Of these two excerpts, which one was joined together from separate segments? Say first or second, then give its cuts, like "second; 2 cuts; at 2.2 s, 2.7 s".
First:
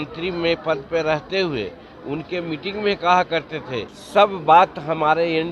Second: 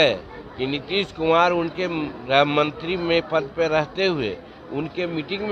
first; 1 cut; at 4.0 s